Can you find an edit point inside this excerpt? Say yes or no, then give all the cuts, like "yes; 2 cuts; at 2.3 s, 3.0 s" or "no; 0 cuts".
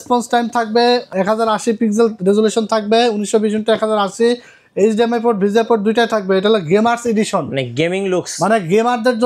yes; 1 cut; at 1.1 s